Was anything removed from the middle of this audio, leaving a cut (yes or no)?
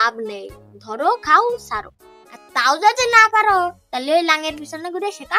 no